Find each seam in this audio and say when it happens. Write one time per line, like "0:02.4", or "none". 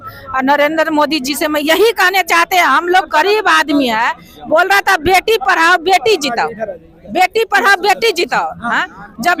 none